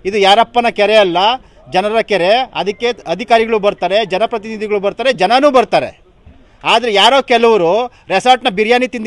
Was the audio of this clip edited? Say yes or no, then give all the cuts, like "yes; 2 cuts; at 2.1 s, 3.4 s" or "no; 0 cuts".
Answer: no; 0 cuts